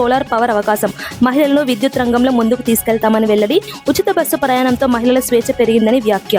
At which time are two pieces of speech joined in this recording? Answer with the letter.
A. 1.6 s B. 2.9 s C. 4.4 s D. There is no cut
D